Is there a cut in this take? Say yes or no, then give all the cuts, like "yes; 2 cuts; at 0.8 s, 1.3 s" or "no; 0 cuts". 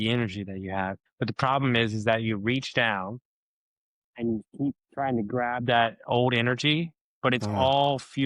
yes; 1 cut; at 1.0 s